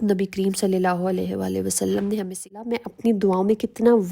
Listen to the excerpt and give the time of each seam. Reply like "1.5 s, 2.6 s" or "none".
2.8 s